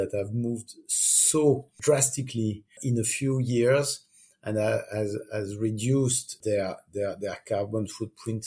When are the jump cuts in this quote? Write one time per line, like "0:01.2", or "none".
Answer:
0:01.7
0:02.8
0:06.4

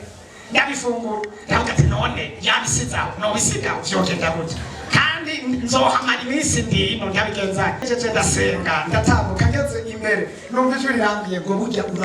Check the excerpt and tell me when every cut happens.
0:07.8

